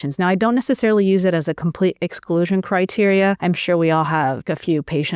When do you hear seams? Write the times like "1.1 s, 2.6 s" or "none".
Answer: 3.4 s, 4.4 s